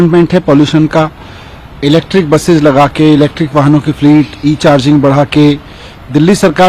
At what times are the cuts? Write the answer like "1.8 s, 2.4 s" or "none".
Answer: none